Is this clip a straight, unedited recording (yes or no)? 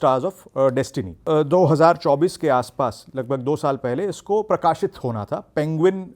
no